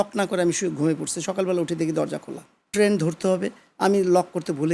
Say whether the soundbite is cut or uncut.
cut